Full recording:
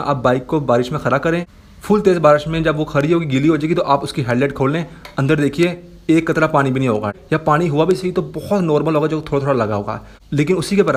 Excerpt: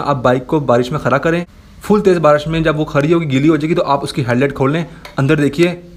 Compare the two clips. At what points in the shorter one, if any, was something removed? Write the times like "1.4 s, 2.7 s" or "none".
none